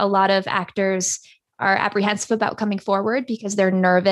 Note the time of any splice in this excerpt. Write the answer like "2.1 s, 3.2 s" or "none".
none